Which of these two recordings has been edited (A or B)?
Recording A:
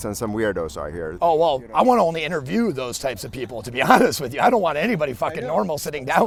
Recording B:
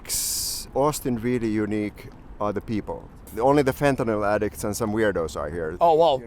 B